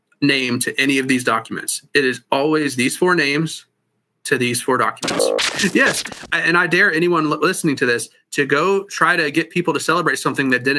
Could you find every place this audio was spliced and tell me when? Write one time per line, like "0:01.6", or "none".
0:05.5

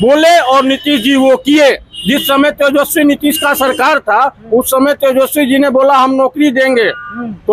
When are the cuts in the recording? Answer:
none

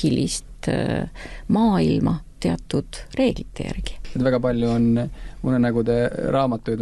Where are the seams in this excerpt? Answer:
0:04.0

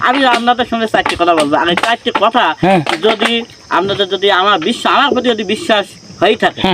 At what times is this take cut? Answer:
none

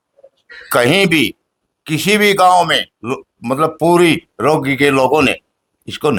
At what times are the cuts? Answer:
none

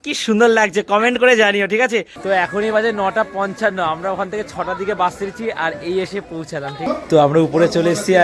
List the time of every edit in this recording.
0:02.1
0:07.0

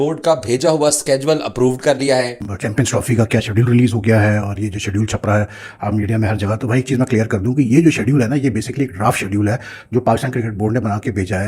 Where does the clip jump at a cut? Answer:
0:02.4

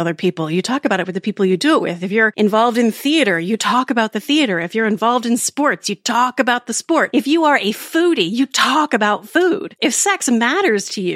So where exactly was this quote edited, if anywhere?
0:02.3
0:07.1
0:09.7

